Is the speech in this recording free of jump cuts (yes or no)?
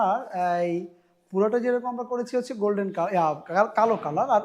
yes